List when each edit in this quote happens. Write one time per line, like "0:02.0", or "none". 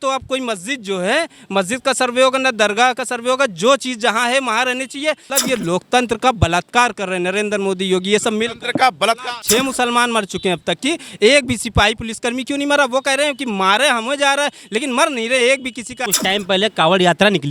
0:05.3
0:09.3
0:16.0